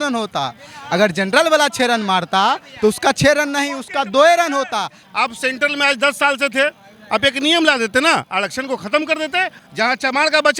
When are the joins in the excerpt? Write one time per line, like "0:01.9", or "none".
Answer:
0:05.0
0:09.6